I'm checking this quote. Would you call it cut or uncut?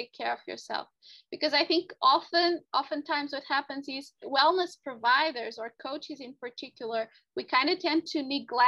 cut